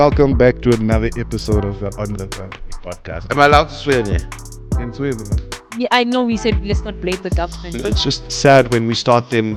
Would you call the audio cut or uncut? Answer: uncut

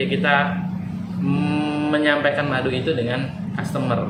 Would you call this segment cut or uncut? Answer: uncut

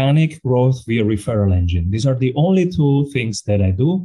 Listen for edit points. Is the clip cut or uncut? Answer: uncut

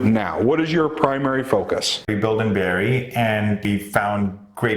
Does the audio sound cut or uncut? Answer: cut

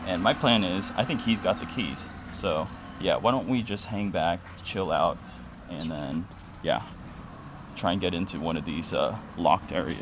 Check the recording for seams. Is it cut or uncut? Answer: cut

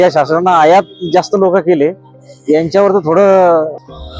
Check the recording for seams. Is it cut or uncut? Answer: uncut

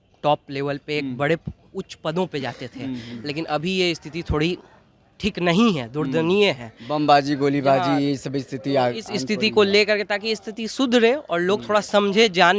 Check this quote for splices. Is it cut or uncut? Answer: uncut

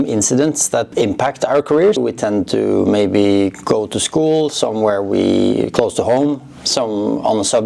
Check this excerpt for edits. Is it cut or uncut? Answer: cut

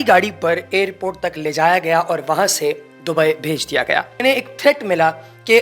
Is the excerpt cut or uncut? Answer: cut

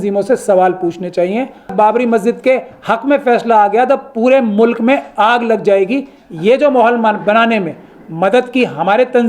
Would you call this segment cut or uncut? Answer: cut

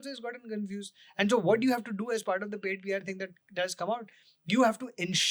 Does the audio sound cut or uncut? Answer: uncut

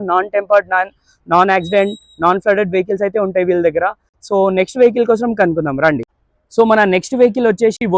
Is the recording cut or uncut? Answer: uncut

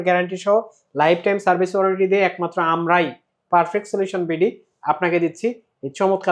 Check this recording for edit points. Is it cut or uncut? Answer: uncut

